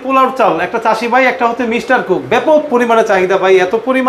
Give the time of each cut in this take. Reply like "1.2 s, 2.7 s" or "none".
none